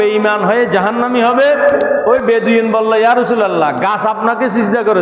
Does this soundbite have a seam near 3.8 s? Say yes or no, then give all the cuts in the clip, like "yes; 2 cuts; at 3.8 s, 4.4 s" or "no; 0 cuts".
no; 1 cut; at 2.0 s